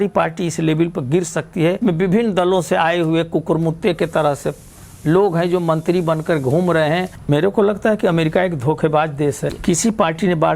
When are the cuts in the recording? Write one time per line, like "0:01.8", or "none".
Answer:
0:01.8
0:07.2
0:09.6